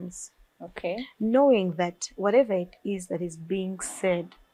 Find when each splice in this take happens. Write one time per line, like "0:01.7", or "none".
none